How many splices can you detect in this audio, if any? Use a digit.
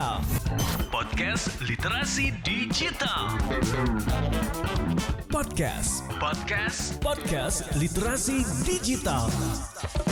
0